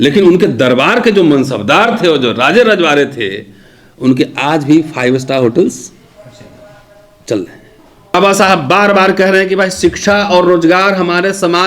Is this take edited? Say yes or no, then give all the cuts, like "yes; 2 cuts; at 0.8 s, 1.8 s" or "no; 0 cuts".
yes; 1 cut; at 8.1 s